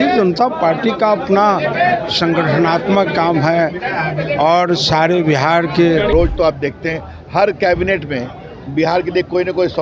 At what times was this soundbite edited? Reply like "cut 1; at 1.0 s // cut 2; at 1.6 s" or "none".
cut 1; at 6.1 s